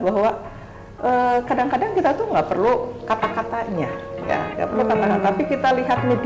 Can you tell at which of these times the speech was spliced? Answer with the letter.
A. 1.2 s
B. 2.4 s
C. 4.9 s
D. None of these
D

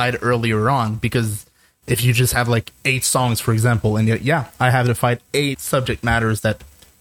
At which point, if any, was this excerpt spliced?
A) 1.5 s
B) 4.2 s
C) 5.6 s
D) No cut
C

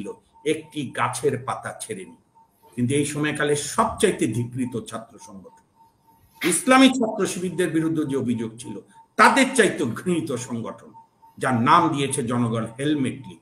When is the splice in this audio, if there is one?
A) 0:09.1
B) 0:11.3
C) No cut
C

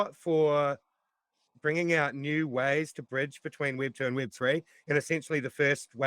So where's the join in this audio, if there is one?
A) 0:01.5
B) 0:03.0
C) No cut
A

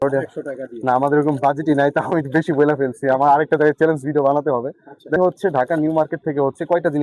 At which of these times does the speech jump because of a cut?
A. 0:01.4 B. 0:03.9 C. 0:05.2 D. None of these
C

